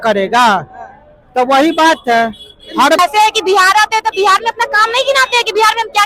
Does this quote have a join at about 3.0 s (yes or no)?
yes